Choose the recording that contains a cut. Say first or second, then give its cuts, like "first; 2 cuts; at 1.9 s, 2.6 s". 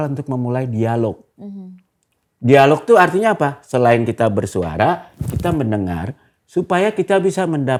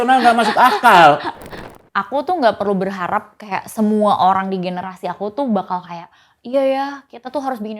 second; 1 cut; at 1.6 s